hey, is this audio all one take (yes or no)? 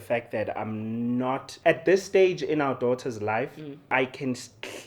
no